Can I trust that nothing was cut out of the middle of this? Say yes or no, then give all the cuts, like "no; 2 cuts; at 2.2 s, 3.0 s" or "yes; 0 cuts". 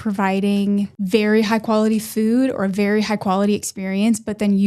no; 1 cut; at 1.0 s